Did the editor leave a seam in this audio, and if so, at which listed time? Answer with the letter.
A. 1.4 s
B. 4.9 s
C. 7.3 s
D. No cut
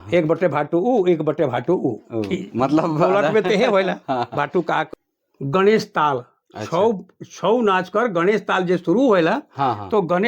B